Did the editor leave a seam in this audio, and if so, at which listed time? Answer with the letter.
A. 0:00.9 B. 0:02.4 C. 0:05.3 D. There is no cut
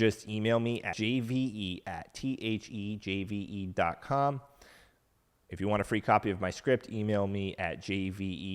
A